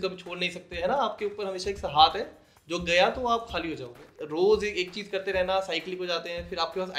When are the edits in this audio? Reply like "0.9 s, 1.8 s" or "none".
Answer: 4.2 s